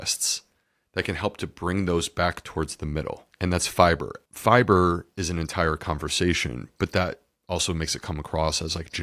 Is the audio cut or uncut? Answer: cut